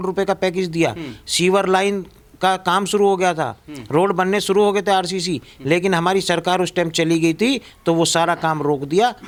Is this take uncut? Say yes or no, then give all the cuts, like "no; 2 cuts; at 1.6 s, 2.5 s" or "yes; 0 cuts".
yes; 0 cuts